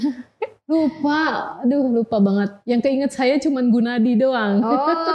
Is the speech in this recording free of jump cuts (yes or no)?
yes